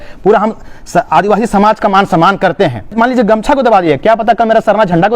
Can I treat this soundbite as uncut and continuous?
no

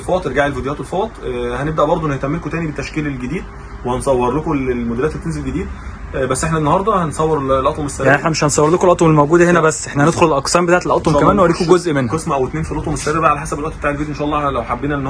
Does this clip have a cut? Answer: no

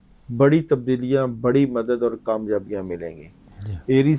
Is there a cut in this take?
no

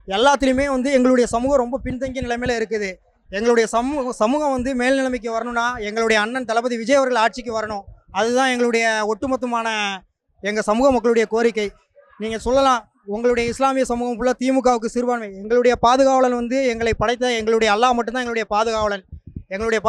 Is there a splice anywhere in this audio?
no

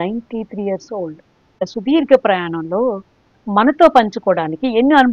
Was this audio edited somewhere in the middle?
yes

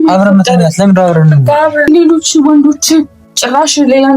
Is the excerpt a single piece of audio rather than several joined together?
no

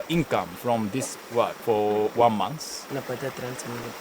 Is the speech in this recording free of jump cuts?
no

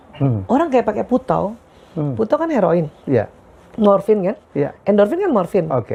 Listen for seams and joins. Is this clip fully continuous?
yes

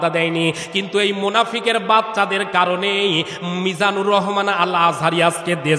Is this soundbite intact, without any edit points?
yes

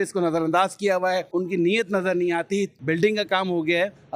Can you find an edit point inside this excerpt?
yes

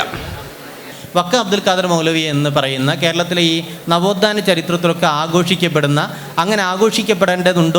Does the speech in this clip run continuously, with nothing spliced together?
no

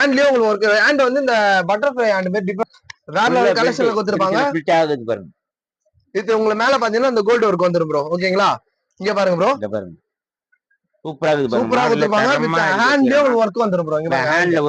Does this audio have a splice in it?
yes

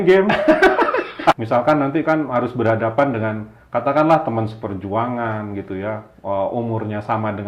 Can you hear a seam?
yes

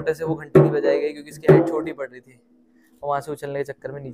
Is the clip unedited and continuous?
yes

